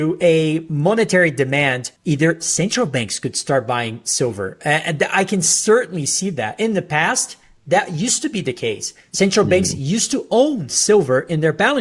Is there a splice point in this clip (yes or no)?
yes